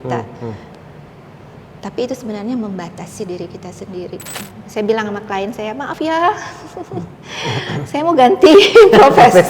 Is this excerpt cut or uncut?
cut